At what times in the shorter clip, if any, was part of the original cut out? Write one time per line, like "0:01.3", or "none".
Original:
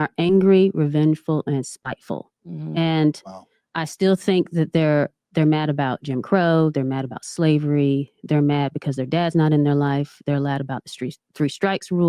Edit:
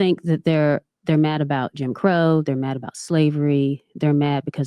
none